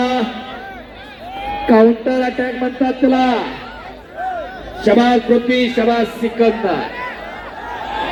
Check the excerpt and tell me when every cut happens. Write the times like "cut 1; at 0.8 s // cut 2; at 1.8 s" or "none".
none